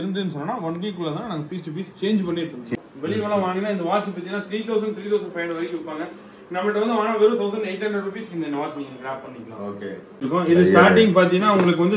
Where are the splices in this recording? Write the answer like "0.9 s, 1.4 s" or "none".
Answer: 2.7 s, 10.1 s